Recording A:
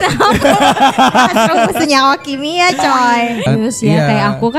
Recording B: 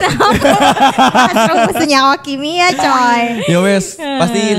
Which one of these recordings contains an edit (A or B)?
A